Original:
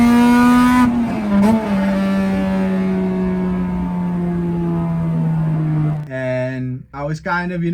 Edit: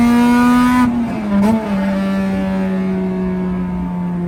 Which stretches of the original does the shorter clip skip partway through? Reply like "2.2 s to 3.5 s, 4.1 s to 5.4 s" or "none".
none